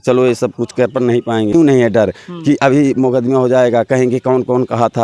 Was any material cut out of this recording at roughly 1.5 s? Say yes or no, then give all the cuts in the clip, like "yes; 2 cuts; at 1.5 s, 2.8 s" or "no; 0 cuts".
yes; 1 cut; at 1.5 s